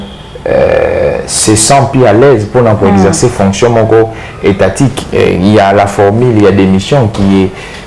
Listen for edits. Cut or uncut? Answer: uncut